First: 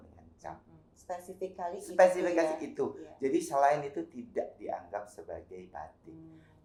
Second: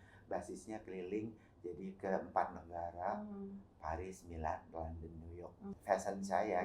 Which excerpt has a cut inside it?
second; 1 cut; at 5.7 s

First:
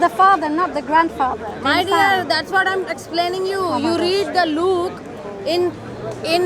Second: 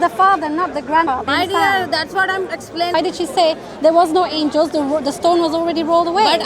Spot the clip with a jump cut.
second; 2 cuts; at 1.1 s, 2.9 s

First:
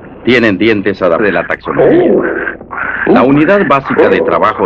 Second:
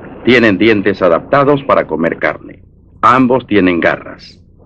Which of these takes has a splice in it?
second; 1 cut; at 1.2 s

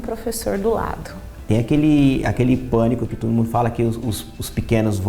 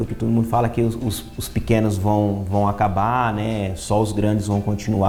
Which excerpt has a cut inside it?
first; 1 cut; at 1.4 s

